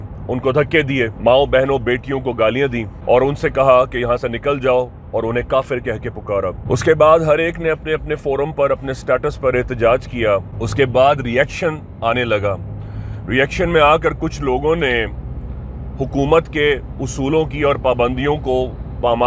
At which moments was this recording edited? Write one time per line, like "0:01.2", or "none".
0:01.1
0:02.9
0:06.6
0:10.6